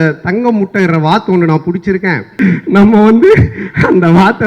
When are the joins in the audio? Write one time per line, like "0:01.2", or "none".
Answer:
0:02.3